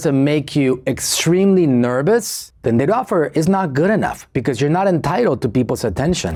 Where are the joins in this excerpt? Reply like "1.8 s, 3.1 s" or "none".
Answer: none